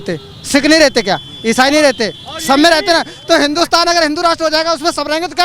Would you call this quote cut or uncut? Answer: uncut